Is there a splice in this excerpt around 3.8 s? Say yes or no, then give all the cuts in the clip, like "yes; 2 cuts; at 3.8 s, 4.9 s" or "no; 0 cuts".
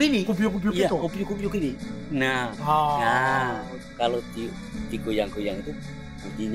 yes; 1 cut; at 3.8 s